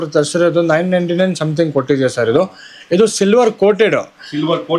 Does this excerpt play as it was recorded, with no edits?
yes; 0 cuts

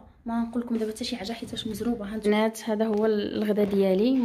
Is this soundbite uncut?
no; 1 cut; at 2.2 s

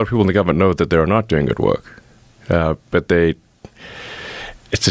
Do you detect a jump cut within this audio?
no; 0 cuts

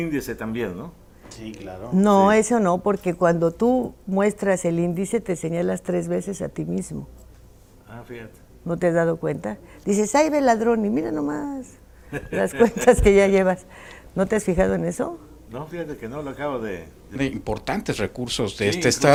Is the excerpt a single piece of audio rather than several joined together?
yes; 0 cuts

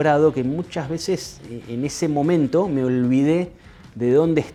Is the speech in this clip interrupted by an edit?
no; 0 cuts

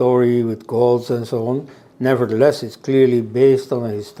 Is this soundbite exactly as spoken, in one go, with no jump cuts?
yes; 0 cuts

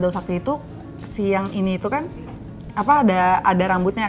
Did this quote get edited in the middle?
no; 0 cuts

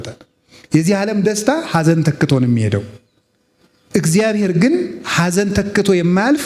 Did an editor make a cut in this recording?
no; 0 cuts

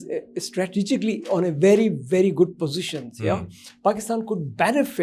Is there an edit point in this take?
no; 0 cuts

